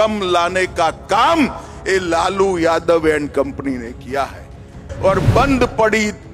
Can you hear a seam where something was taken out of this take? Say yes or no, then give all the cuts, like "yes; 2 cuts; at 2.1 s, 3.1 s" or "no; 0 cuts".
yes; 1 cut; at 4.8 s